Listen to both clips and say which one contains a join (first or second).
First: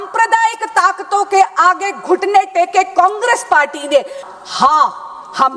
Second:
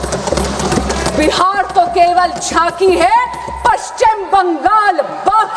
first